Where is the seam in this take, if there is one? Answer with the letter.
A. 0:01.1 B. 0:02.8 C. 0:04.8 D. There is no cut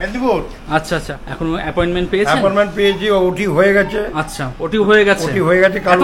A